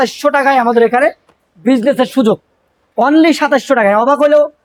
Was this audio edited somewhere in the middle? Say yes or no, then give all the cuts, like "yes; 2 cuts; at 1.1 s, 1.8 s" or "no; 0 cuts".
no; 0 cuts